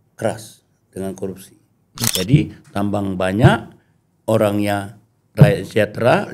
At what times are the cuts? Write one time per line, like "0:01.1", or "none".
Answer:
0:02.1